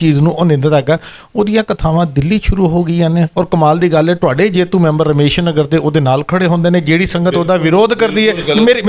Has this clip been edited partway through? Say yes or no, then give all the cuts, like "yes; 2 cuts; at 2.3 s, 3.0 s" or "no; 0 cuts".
no; 0 cuts